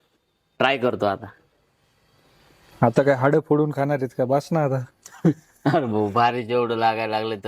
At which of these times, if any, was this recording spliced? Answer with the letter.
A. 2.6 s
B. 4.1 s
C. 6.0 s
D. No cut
A